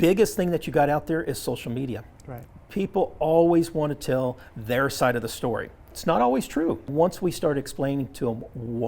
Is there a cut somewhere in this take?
yes; 2 cuts; at 5.9 s, 6.9 s

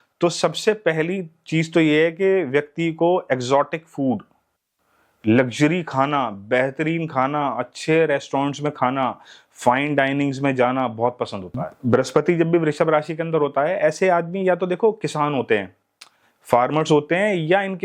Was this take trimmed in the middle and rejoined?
yes; 1 cut; at 11.7 s

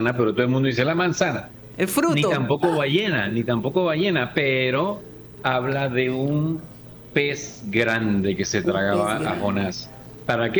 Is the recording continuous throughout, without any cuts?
yes; 0 cuts

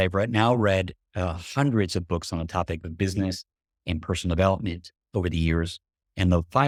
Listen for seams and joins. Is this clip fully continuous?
yes; 0 cuts

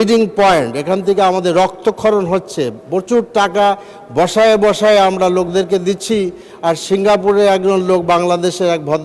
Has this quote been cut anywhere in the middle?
no; 0 cuts

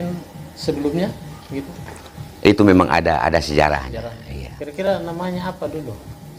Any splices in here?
no; 0 cuts

